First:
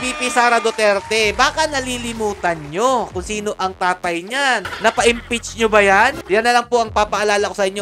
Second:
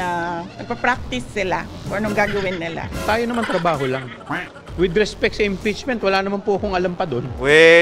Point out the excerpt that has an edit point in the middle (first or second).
first